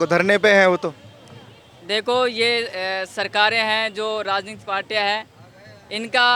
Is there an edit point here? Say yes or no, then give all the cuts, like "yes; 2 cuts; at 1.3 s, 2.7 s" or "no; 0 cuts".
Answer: no; 0 cuts